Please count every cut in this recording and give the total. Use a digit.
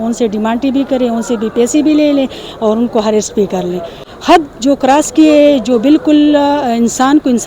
1